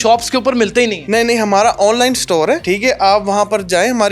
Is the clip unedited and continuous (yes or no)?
no